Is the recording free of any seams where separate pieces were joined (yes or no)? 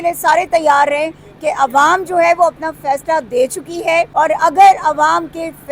no